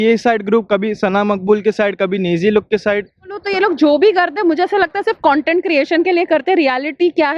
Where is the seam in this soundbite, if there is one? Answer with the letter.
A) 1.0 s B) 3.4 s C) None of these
B